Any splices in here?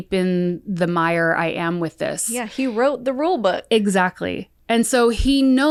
no; 0 cuts

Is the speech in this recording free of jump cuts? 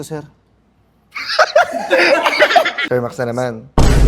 no; 1 cut; at 2.8 s

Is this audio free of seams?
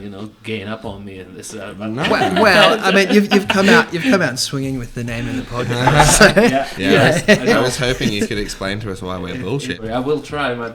no; 1 cut; at 9.8 s

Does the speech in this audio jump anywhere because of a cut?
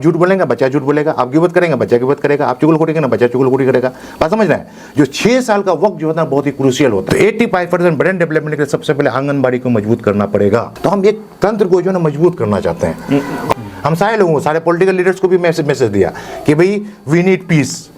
yes; 3 cuts; at 7.0 s, 10.7 s, 13.5 s

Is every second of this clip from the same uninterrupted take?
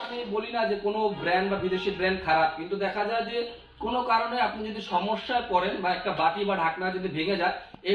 yes; 0 cuts

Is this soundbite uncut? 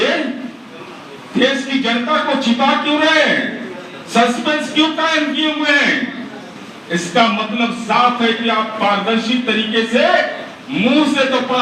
yes; 0 cuts

